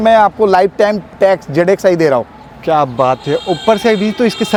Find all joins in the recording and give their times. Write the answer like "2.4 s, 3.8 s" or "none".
none